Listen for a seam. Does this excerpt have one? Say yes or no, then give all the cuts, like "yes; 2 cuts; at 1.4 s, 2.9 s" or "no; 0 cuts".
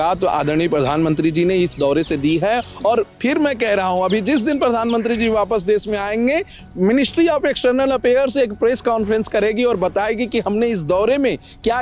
no; 0 cuts